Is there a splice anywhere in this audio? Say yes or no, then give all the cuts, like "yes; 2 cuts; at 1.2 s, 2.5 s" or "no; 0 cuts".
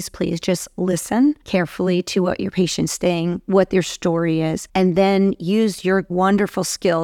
yes; 3 cuts; at 1.4 s, 4.6 s, 6.1 s